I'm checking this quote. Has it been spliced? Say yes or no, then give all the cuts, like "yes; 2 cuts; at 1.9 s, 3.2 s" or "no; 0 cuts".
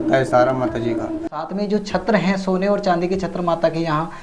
yes; 1 cut; at 1.5 s